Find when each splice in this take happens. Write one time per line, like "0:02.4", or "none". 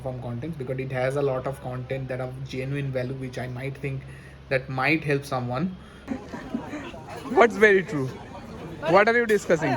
0:05.9